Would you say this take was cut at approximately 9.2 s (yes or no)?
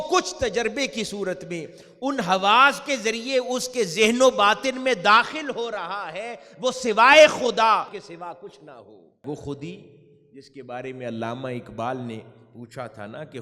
yes